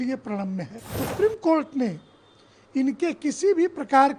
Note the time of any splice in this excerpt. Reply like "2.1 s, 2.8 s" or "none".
1.0 s